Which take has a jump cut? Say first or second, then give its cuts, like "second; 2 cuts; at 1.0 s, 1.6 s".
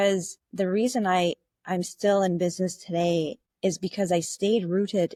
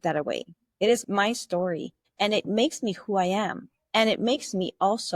second; 1 cut; at 1.0 s